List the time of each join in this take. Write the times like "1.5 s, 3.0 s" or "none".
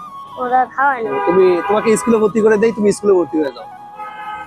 1.0 s